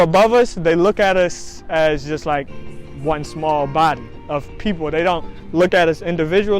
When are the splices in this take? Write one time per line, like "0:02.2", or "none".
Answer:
none